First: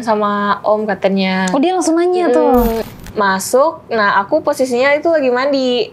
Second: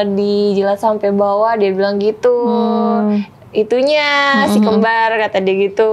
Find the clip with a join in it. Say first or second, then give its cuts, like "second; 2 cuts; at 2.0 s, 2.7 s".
first; 1 cut; at 2.8 s